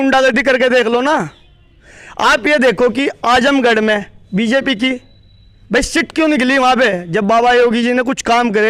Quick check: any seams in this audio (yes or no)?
no